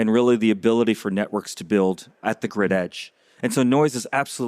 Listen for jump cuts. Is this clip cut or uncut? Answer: cut